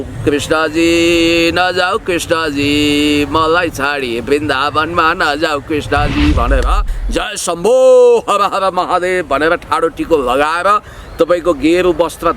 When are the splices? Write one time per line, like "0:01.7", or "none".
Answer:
0:07.0